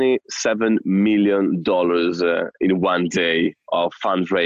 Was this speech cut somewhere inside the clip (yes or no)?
no